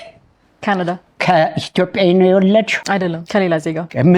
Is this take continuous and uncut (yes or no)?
no